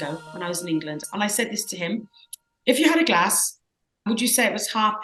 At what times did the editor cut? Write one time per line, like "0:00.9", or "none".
none